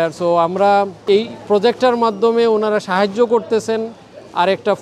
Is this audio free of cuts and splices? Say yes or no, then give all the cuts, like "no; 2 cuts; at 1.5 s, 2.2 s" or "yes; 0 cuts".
no; 1 cut; at 1.0 s